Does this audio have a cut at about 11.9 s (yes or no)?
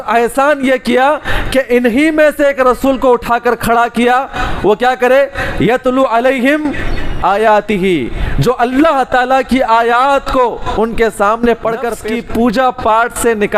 yes